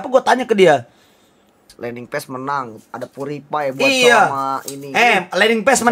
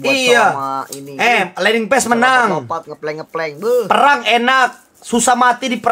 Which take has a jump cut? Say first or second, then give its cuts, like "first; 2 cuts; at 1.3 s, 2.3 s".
first; 1 cut; at 1.7 s